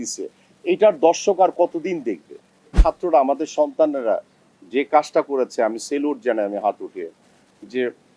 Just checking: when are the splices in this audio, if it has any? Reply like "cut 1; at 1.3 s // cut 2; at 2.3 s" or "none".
cut 1; at 2.7 s

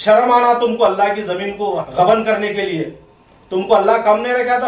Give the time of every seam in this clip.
cut 1; at 1.8 s

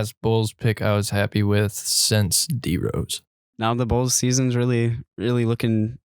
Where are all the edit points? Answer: cut 1; at 3.4 s

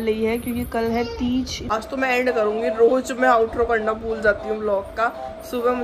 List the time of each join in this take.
cut 1; at 1.7 s

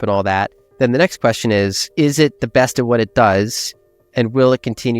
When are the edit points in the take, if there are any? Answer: cut 1; at 1.8 s

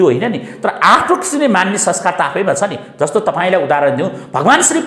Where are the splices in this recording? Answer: none

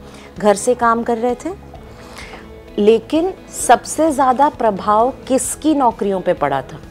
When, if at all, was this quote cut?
none

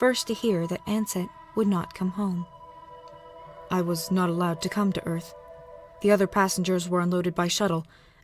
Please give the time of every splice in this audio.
cut 1; at 2.5 s

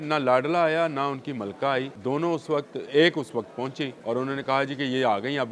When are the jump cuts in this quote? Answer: cut 1; at 1.9 s // cut 2; at 4.0 s

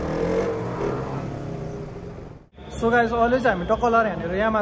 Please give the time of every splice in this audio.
none

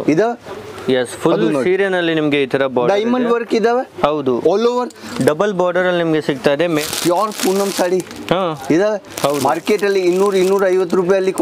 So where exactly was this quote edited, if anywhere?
cut 1; at 6.8 s

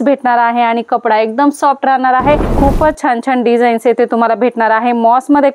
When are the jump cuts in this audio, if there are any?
cut 1; at 2.5 s

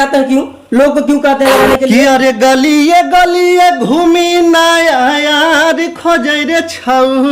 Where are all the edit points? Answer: cut 1; at 1.9 s

